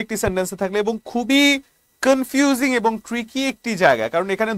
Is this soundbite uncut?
yes; 0 cuts

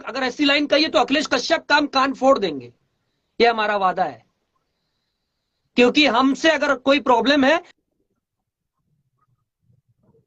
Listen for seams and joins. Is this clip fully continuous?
yes; 0 cuts

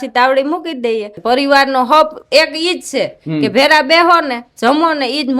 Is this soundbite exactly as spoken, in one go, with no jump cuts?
no; 1 cut; at 1.2 s

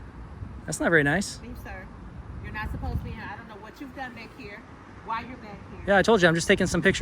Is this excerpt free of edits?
yes; 0 cuts

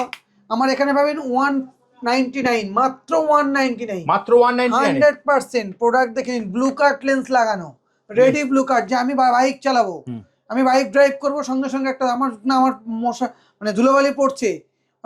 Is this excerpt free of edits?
yes; 0 cuts

